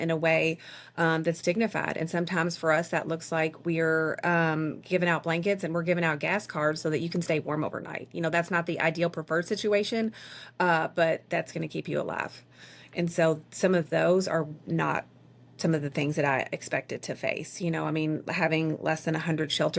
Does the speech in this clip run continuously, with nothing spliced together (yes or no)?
yes